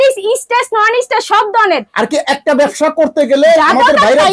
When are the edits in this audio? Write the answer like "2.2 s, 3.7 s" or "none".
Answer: none

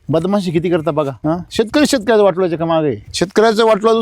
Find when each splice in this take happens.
1.1 s, 3.1 s

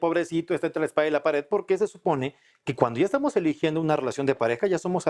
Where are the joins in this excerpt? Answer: none

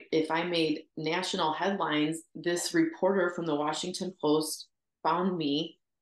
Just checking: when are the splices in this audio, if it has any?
2.3 s

